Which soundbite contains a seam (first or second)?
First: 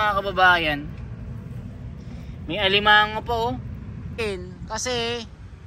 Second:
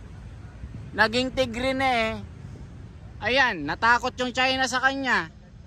first